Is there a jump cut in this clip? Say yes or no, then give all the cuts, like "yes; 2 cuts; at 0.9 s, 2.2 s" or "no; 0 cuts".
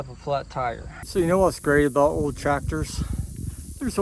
yes; 1 cut; at 0.9 s